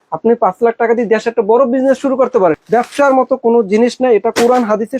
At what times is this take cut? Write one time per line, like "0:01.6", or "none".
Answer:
0:02.6